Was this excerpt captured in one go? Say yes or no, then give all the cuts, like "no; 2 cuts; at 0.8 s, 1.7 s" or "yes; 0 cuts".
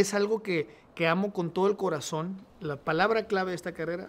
no; 1 cut; at 2.4 s